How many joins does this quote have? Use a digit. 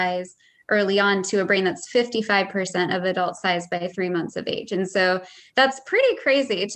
0